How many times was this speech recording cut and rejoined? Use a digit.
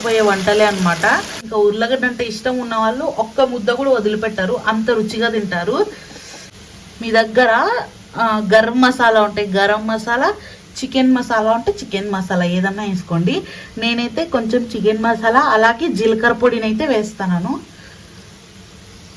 2